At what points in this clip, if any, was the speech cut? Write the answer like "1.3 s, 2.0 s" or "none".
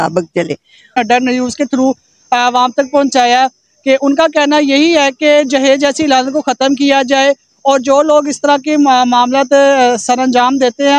1.0 s